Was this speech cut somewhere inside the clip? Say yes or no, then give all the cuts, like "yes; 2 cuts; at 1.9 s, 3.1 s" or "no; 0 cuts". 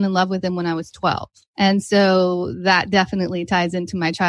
yes; 1 cut; at 1.4 s